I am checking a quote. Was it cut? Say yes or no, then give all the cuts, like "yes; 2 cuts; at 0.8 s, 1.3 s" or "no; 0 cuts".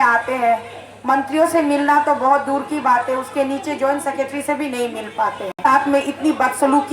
yes; 1 cut; at 5.6 s